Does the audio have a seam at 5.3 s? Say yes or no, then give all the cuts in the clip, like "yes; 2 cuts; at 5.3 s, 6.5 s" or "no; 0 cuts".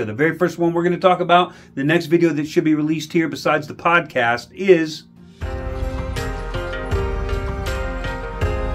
yes; 1 cut; at 5.3 s